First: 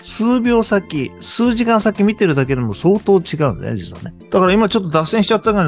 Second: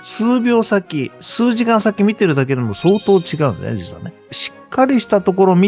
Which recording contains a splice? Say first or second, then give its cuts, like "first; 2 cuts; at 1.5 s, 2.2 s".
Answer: second; 1 cut; at 4.1 s